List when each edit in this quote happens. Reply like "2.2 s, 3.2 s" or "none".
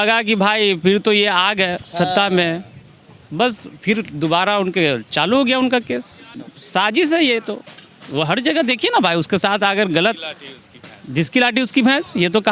none